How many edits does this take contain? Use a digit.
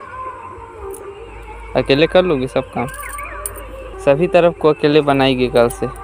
1